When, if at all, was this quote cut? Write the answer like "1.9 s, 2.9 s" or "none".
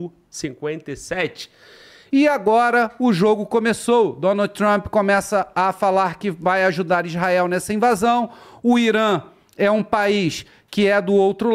1.9 s